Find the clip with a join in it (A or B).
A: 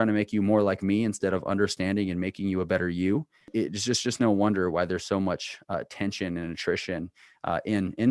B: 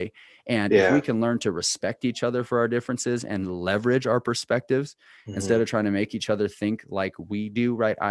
A